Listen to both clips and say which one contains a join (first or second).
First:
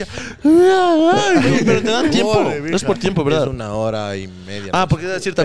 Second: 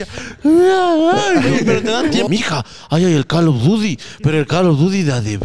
second